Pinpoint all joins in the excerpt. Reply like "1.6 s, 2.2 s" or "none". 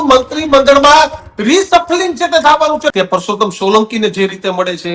2.9 s